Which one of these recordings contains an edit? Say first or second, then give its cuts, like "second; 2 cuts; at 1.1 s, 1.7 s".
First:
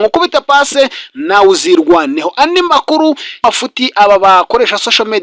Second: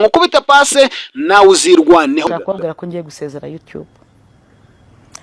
second; 1 cut; at 2.3 s